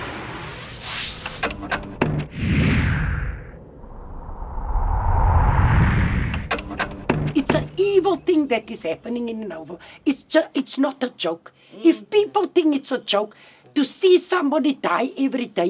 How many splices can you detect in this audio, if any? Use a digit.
0